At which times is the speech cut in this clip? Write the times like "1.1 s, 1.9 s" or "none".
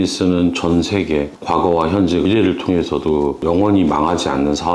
1.3 s